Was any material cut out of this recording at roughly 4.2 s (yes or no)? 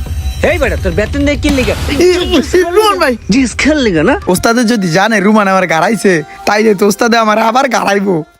yes